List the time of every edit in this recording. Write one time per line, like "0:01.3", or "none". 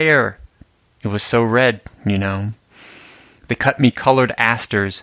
none